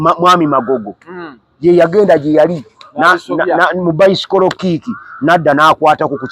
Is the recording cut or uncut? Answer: uncut